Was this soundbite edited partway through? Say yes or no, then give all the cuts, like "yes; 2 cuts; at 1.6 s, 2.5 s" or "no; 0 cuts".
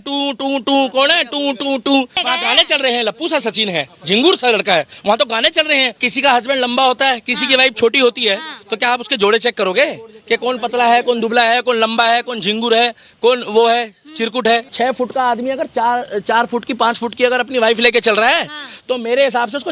yes; 3 cuts; at 2.4 s, 6.0 s, 14.7 s